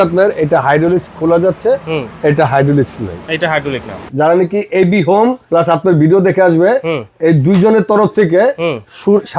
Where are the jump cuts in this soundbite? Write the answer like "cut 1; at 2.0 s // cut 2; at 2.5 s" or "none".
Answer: cut 1; at 4.1 s // cut 2; at 5.4 s